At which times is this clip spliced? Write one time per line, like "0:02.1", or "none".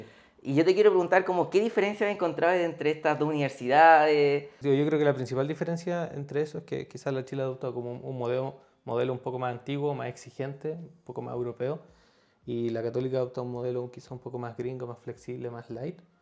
0:04.5